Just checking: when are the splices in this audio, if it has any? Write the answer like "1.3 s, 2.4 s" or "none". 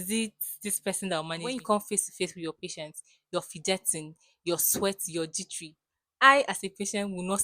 1.5 s

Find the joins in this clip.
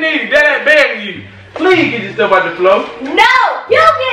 none

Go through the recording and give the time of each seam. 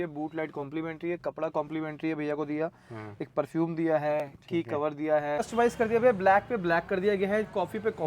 5.5 s

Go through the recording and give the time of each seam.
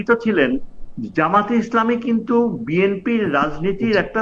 none

